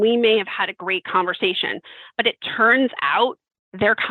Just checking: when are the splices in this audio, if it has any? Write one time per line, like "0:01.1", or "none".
none